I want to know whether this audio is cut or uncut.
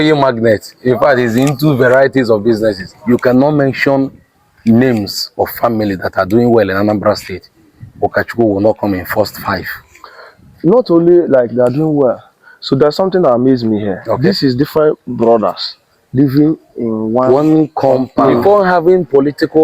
cut